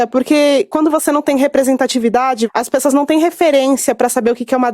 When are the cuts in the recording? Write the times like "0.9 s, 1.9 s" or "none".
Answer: 2.5 s